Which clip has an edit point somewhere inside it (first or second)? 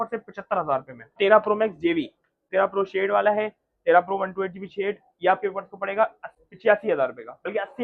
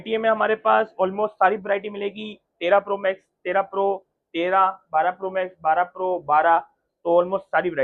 first